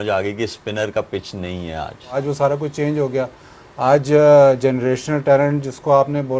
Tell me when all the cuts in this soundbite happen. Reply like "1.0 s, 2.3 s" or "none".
2.1 s